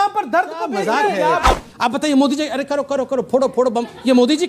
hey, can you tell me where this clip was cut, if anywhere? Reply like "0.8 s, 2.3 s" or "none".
1.6 s